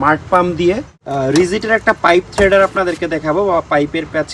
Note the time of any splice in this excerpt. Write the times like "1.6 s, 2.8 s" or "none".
1.0 s